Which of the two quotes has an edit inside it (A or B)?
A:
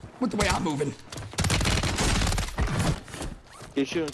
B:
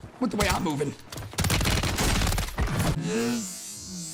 A